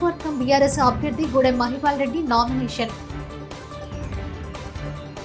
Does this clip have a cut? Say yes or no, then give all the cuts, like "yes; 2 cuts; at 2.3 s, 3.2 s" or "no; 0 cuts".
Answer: no; 0 cuts